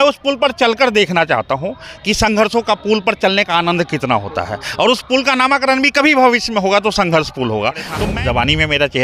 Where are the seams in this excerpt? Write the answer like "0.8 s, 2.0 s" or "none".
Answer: 7.9 s